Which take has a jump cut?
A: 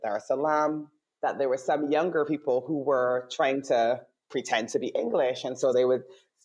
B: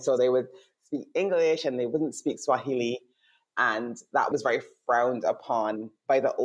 B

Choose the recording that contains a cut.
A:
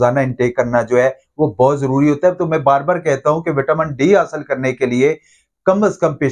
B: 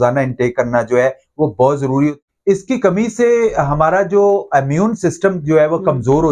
B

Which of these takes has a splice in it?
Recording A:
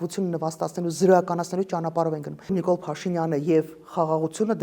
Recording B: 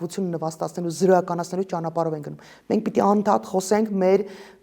A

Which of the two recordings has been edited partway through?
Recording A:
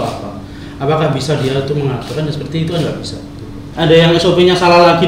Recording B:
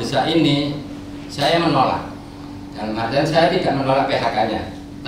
A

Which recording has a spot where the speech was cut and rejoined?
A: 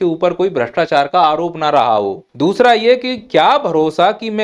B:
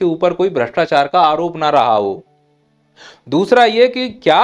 A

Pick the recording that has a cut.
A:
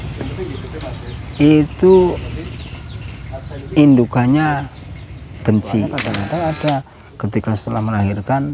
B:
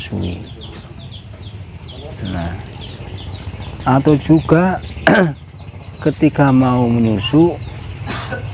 A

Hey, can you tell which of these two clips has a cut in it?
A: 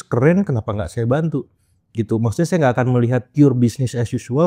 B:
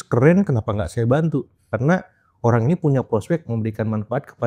B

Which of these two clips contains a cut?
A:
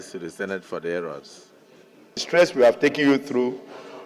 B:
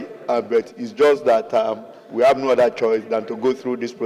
A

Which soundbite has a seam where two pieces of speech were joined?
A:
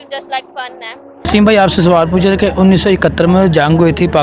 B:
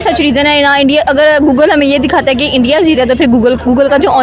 A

